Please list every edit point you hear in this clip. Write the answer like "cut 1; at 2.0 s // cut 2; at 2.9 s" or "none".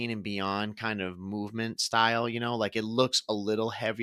none